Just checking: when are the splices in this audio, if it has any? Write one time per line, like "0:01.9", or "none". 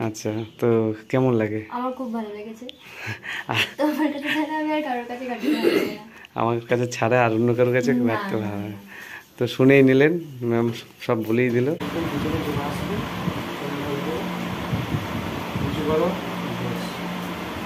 0:11.8

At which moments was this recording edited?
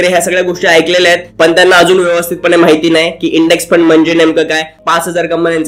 0:04.7

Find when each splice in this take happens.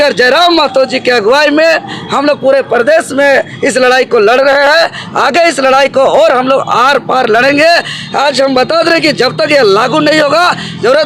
none

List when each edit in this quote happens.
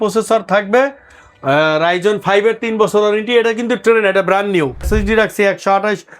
0:04.8

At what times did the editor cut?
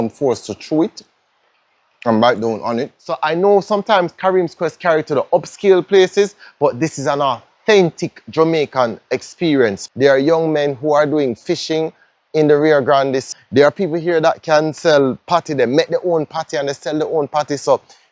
0:03.2
0:09.8
0:13.3

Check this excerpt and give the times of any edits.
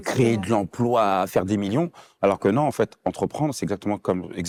none

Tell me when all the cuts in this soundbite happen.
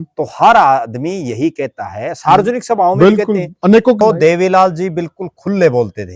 0:04.0

